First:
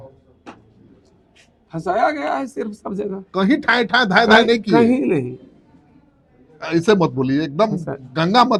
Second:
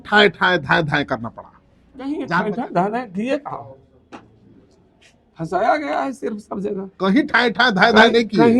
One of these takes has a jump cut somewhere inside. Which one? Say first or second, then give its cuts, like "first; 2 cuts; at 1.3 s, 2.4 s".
second; 1 cut; at 2.3 s